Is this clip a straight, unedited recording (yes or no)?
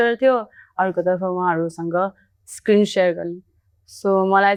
yes